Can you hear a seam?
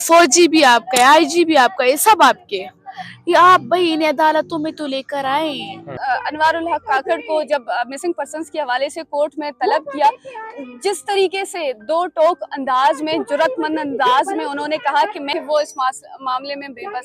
yes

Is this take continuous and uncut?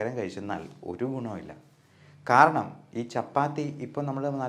yes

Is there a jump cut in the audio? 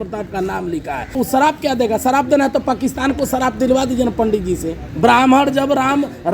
yes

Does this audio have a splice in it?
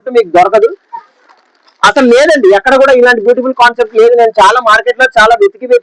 no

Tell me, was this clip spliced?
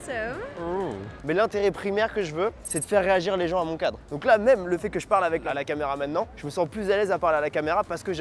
yes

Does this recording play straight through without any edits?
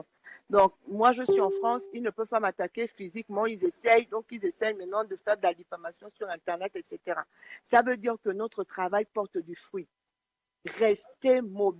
no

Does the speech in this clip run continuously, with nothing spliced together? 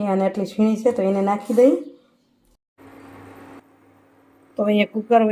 no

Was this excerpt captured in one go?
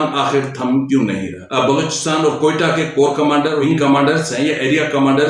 no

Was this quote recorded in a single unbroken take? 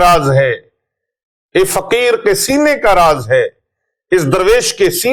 yes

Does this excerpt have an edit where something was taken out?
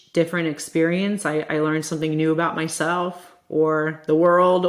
no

